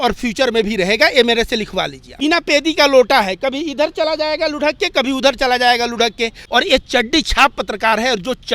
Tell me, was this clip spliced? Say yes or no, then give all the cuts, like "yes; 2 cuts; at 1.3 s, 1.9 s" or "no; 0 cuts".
yes; 2 cuts; at 2.2 s, 6.3 s